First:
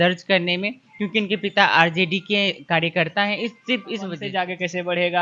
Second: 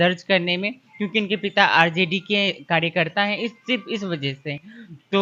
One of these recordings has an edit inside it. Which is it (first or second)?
first